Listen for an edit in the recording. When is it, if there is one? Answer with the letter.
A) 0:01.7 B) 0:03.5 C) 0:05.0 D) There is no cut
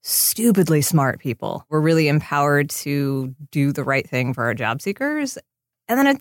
A